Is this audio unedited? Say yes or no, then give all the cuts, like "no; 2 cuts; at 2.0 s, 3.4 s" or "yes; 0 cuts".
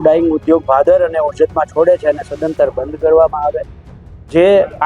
yes; 0 cuts